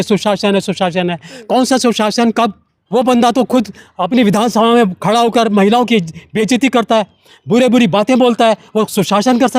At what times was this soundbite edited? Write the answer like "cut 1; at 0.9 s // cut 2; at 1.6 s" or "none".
cut 1; at 2.7 s